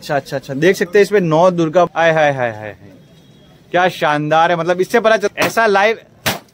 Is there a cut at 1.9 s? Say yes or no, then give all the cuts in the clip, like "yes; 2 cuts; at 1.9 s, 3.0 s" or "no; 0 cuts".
yes; 2 cuts; at 1.9 s, 5.2 s